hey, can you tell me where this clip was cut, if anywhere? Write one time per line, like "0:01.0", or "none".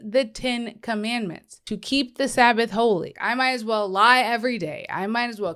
0:01.5
0:03.1